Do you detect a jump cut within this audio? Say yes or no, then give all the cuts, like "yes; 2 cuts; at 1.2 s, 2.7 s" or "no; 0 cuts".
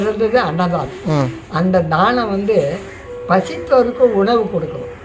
no; 0 cuts